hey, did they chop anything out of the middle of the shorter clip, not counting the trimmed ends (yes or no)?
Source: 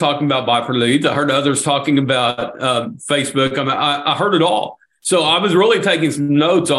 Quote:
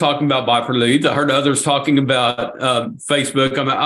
no